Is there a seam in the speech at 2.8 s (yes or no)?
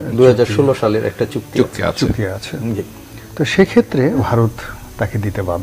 no